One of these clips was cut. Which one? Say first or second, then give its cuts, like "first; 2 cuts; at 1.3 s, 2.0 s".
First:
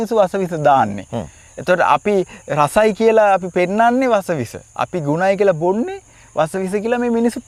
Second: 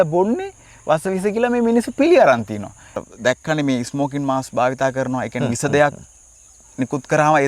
second; 1 cut; at 3.0 s